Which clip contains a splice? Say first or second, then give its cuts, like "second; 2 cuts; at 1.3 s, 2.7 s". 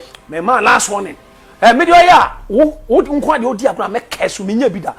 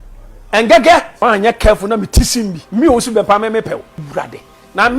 second; 3 cuts; at 1.1 s, 2.6 s, 4.0 s